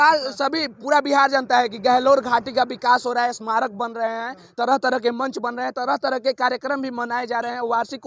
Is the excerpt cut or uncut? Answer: uncut